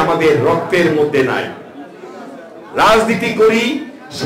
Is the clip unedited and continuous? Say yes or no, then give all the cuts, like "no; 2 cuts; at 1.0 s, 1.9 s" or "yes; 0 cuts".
yes; 0 cuts